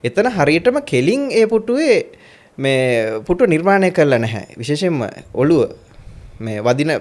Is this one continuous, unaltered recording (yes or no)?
yes